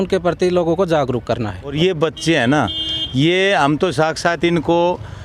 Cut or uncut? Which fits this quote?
cut